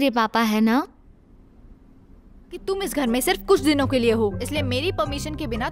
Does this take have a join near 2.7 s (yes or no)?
yes